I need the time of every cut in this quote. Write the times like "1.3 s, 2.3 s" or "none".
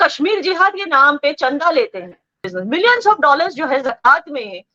2.5 s